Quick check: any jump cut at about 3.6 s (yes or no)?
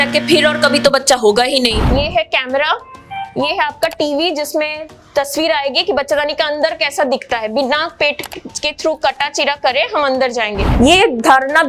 no